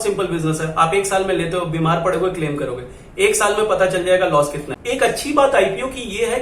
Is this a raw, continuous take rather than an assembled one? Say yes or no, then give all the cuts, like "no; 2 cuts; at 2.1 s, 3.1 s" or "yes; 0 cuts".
no; 1 cut; at 4.7 s